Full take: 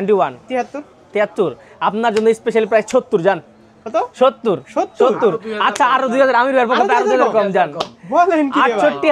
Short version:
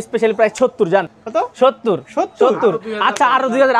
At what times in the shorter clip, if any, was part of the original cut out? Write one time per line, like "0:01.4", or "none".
0:01.2